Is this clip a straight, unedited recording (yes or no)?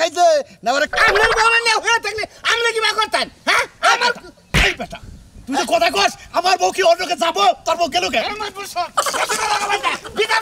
no